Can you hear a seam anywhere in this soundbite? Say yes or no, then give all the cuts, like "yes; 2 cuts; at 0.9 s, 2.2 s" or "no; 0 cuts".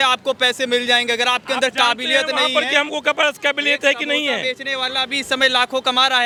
no; 0 cuts